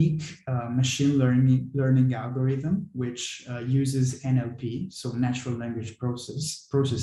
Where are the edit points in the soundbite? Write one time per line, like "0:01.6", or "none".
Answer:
none